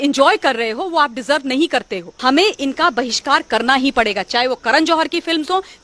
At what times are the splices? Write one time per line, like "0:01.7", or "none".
0:02.0